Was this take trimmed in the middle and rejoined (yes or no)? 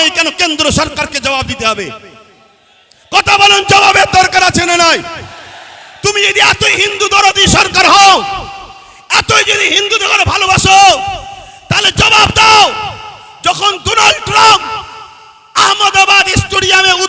no